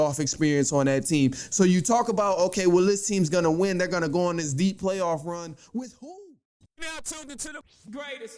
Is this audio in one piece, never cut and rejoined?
no; 1 cut; at 6.1 s

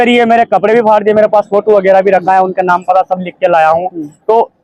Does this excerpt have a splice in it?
no; 0 cuts

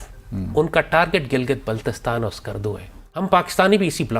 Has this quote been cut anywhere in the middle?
yes; 1 cut; at 3.2 s

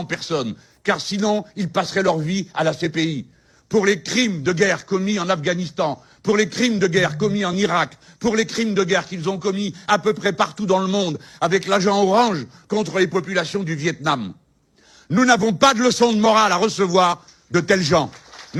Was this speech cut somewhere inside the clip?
no; 0 cuts

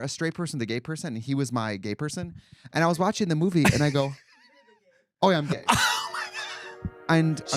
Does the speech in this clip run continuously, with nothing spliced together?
yes; 0 cuts

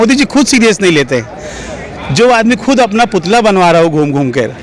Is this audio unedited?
yes; 0 cuts

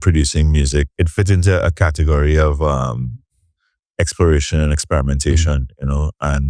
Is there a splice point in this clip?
yes; 1 cut; at 0.9 s

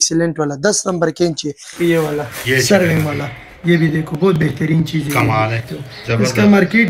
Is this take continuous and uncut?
no; 2 cuts; at 1.7 s, 5.6 s

